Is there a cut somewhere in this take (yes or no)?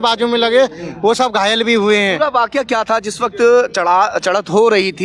no